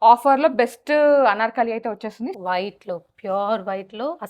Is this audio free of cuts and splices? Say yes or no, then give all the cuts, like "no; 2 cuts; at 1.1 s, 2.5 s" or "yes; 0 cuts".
no; 1 cut; at 2.3 s